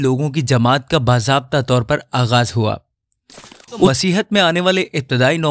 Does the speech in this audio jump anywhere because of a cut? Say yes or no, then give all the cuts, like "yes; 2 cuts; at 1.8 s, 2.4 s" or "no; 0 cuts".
yes; 1 cut; at 3.9 s